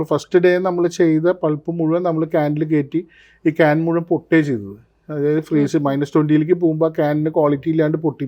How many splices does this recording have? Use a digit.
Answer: 0